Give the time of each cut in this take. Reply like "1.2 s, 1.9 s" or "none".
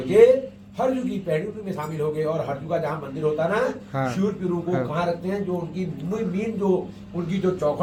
none